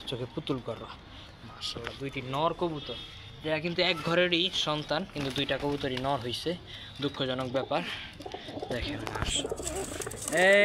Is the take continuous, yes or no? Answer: yes